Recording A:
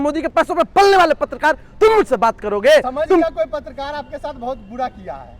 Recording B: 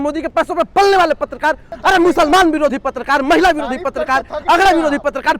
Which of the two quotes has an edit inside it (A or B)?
B